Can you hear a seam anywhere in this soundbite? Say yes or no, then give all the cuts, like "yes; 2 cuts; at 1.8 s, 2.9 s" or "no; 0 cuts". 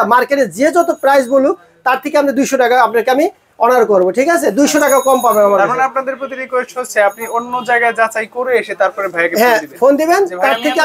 no; 0 cuts